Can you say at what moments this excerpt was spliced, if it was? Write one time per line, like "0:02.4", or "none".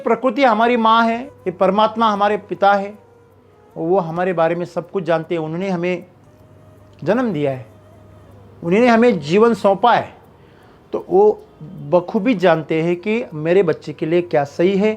0:01.4